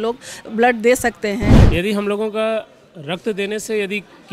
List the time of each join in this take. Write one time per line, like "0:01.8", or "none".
0:01.7